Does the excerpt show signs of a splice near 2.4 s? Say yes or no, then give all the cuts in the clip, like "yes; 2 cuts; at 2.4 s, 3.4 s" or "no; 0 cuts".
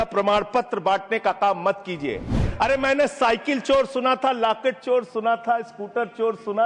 yes; 1 cut; at 2.4 s